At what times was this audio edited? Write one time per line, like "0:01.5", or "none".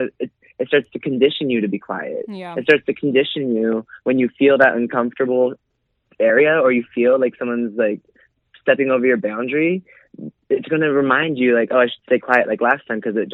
none